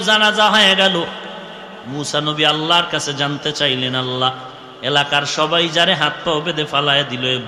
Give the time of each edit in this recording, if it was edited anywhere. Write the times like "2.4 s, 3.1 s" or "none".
none